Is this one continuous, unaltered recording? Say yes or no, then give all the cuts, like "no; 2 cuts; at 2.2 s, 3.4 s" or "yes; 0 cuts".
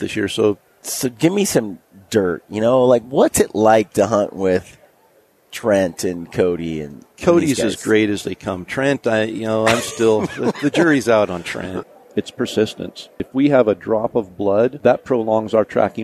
no; 3 cuts; at 11.8 s, 13.2 s, 14.8 s